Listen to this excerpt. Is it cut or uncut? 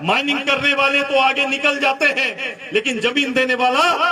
uncut